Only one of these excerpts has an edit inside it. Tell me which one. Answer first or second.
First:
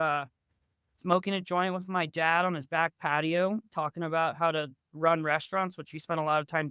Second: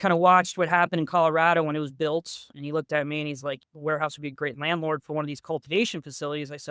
second